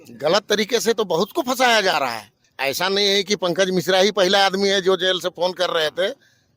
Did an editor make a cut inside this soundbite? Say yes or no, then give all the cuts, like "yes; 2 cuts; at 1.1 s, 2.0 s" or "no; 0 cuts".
yes; 1 cut; at 2.4 s